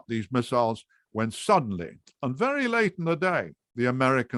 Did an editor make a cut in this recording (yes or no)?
no